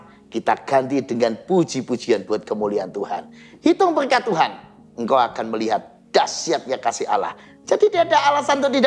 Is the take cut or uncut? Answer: uncut